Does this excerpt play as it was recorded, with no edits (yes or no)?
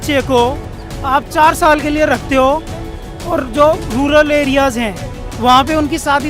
yes